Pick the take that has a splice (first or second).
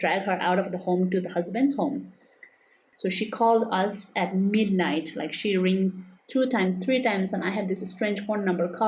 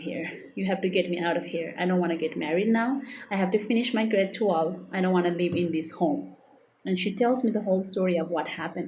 first